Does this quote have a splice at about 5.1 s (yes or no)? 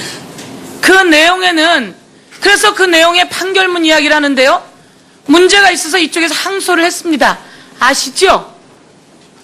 no